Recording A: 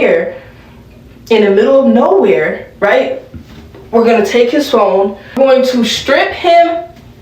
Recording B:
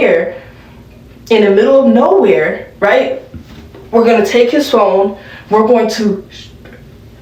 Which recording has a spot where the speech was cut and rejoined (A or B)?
A